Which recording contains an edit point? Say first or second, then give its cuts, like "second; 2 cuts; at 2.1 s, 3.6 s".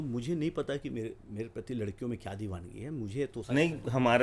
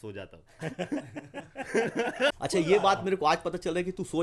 second; 1 cut; at 2.4 s